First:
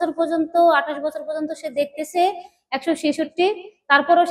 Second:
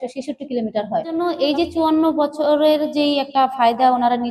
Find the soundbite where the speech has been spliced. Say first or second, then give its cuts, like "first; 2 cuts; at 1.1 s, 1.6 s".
second; 1 cut; at 1.2 s